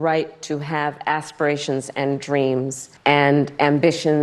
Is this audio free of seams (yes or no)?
no